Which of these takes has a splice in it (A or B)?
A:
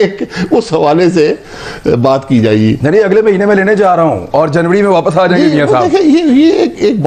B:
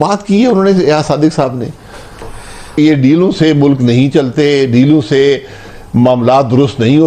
B